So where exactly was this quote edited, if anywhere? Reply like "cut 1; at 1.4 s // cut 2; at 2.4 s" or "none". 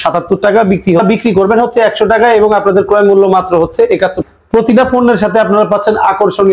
cut 1; at 1.0 s // cut 2; at 4.3 s